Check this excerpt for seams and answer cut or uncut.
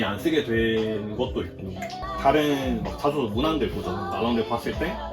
cut